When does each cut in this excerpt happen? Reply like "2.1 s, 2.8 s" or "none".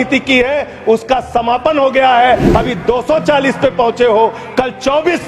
none